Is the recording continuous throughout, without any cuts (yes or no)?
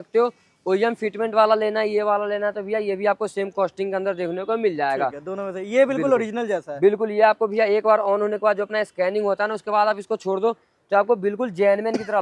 yes